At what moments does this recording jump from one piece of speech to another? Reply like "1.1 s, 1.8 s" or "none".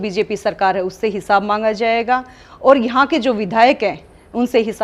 none